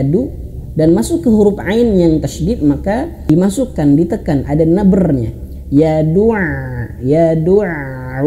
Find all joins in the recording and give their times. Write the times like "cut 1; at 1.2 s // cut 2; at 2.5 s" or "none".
cut 1; at 3.3 s